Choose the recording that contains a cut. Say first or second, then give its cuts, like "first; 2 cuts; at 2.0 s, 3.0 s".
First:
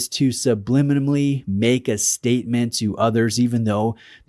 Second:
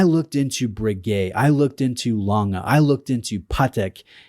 second; 1 cut; at 3.0 s